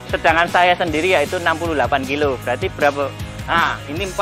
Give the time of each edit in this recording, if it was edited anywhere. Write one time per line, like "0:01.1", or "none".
0:03.3